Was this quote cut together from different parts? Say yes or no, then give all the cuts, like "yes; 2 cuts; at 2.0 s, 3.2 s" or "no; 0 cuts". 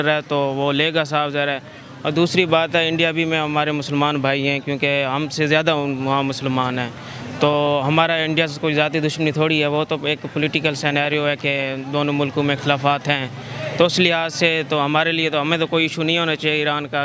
no; 0 cuts